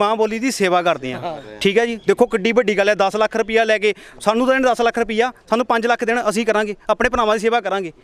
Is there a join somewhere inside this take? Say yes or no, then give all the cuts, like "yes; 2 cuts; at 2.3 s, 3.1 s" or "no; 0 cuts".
no; 0 cuts